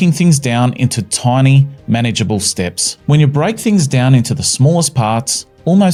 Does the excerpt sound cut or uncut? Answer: uncut